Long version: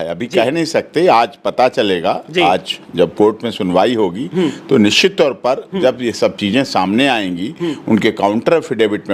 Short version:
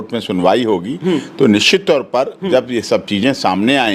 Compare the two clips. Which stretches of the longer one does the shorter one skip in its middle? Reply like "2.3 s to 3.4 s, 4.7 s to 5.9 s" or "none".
none